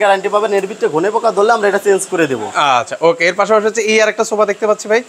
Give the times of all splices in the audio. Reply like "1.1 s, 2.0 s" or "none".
none

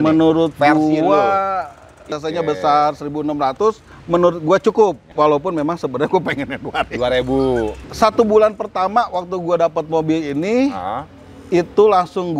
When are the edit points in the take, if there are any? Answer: 2.1 s, 3.9 s, 5.1 s, 7.8 s

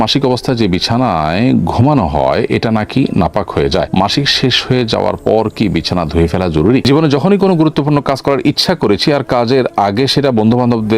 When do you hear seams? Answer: 6.8 s

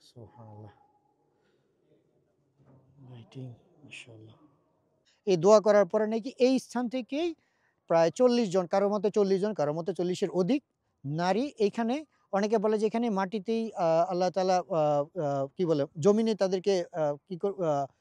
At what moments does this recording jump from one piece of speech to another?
5.1 s

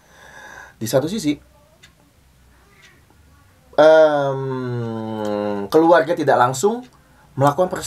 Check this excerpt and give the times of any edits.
none

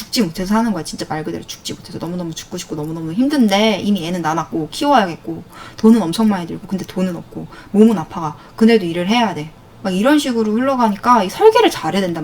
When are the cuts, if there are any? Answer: none

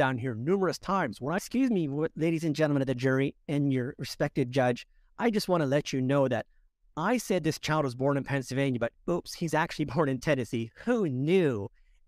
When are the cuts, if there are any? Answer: 1.4 s

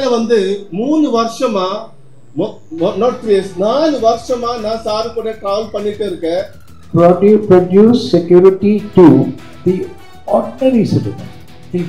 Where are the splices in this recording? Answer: 6.8 s

